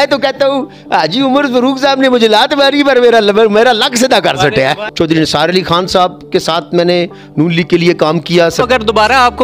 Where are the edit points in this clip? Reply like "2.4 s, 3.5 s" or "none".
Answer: 4.8 s, 8.6 s